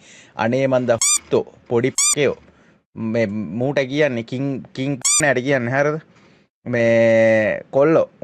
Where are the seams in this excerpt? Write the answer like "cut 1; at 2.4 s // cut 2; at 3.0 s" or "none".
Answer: none